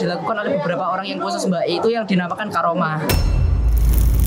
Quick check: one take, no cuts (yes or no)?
yes